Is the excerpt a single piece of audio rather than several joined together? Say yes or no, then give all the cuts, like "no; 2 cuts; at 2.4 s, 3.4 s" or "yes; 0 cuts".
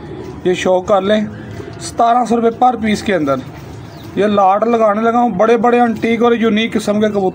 yes; 0 cuts